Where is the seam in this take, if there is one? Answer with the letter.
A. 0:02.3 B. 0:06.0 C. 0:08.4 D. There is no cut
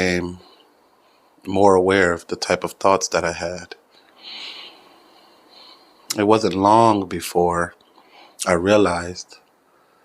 B